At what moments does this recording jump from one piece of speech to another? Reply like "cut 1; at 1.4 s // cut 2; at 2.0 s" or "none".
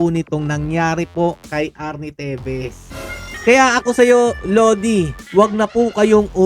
cut 1; at 3.2 s // cut 2; at 5.1 s